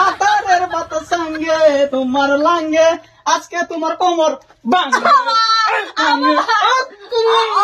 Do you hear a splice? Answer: no; 0 cuts

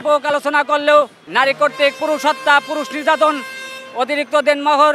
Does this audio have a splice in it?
yes; 1 cut; at 1.2 s

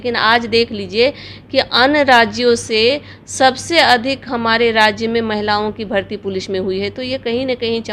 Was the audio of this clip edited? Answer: no; 0 cuts

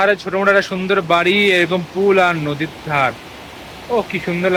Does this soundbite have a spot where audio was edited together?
no; 0 cuts

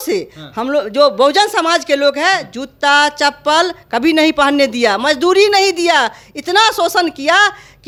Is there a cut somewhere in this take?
no; 0 cuts

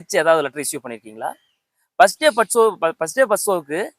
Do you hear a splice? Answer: no; 0 cuts

